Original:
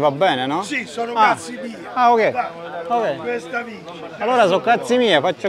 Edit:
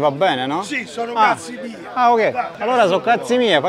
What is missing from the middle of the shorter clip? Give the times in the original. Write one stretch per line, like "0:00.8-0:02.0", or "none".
0:02.5-0:04.1